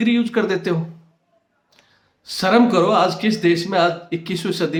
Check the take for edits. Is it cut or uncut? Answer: uncut